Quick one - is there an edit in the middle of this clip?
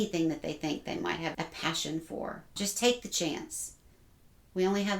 yes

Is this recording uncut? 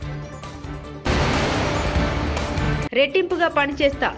no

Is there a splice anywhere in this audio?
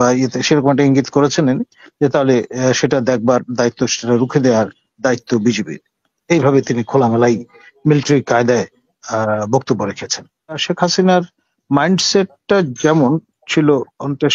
yes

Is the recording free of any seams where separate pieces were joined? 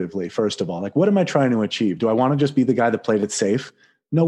yes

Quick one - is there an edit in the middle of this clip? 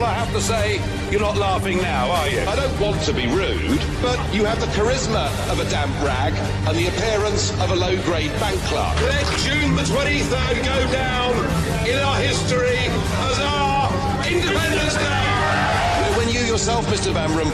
no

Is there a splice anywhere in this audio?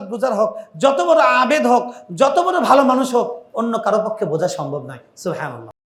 no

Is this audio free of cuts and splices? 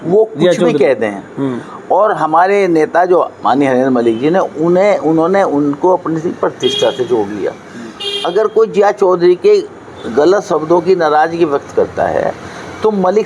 yes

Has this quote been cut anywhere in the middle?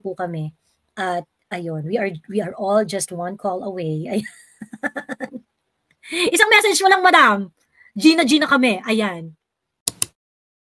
no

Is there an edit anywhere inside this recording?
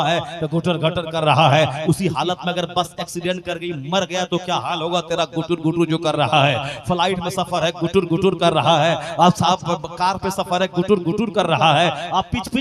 no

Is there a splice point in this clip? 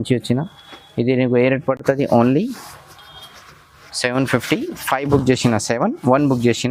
no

